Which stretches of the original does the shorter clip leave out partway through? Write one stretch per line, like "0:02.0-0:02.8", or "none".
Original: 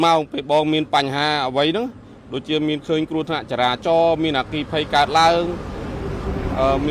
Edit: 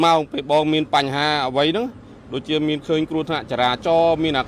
none